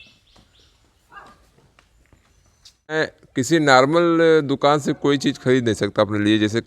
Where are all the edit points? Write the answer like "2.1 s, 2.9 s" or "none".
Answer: 2.9 s